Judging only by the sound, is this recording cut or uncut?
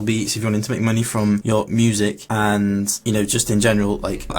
cut